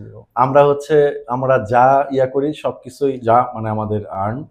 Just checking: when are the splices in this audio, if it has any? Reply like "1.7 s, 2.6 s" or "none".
none